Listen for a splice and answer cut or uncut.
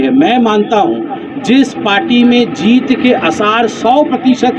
uncut